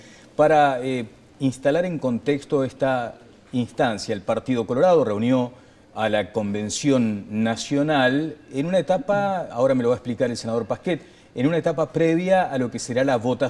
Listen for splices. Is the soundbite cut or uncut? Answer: cut